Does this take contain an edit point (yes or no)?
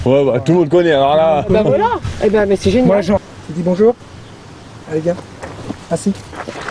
yes